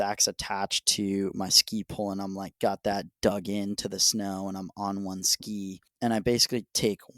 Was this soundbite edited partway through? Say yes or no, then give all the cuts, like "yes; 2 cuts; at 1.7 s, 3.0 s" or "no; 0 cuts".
yes; 1 cut; at 5.9 s